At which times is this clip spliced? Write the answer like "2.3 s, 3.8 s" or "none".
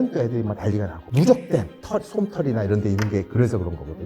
1.0 s, 1.8 s